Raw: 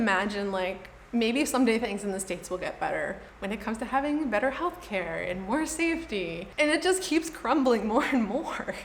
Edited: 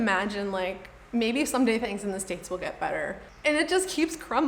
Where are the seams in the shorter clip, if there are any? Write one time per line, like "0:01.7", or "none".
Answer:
0:03.3